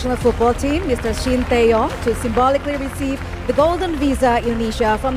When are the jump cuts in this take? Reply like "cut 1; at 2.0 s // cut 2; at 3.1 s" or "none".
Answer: none